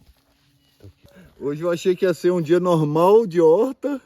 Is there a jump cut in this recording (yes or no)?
yes